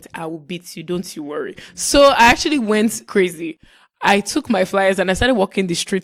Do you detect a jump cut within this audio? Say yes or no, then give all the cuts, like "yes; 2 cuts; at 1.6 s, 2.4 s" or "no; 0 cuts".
yes; 1 cut; at 3.0 s